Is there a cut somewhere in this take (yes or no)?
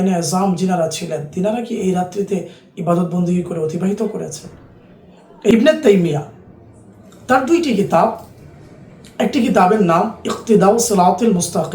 yes